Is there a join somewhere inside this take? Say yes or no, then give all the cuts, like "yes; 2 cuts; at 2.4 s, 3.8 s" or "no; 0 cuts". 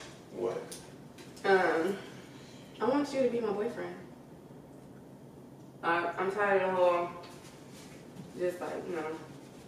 no; 0 cuts